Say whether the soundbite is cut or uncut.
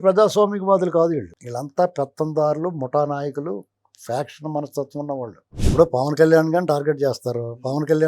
cut